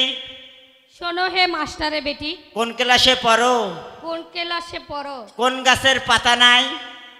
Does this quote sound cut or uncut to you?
uncut